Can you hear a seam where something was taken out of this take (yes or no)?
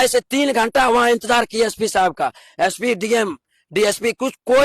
no